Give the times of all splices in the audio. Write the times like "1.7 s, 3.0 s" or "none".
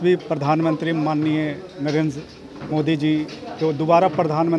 none

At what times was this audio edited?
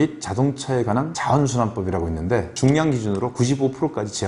1.1 s, 2.5 s

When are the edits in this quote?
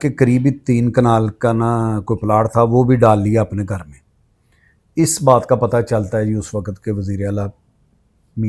none

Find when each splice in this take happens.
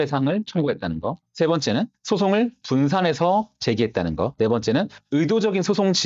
4.3 s

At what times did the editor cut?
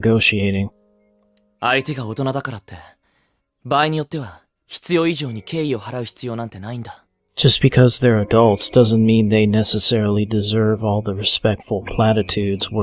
9.8 s

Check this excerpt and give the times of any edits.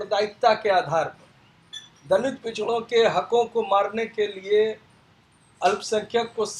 none

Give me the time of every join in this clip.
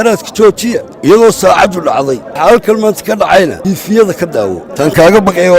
0.9 s, 2.3 s, 3.6 s, 4.7 s

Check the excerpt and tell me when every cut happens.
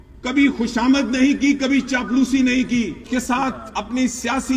3.1 s

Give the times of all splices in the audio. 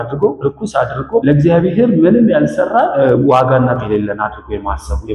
0.9 s, 2.9 s, 3.8 s

